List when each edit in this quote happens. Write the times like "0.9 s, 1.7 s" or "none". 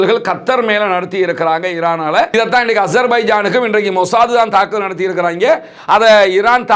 2.3 s

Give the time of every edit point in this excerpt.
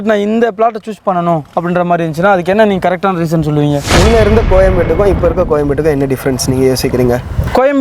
3.8 s

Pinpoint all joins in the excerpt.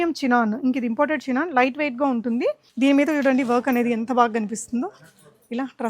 2.6 s

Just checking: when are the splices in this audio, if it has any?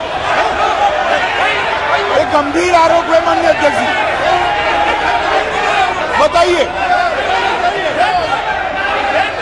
none

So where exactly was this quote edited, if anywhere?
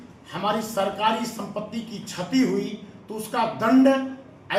none

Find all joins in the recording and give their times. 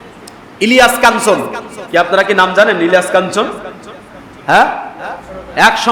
none

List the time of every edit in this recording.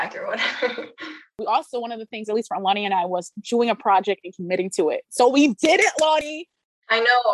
1.4 s

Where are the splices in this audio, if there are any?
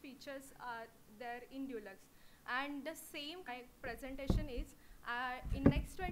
none

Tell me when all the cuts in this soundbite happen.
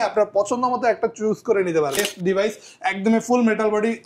2.0 s

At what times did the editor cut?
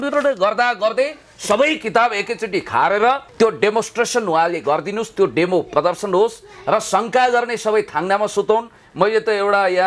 3.3 s

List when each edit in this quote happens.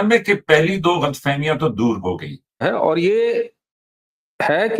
2.6 s

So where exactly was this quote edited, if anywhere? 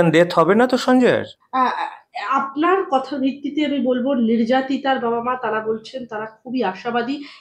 none

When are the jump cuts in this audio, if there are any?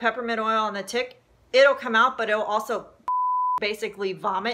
none

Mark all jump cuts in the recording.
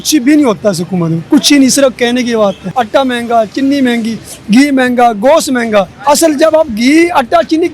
2.7 s, 5.9 s

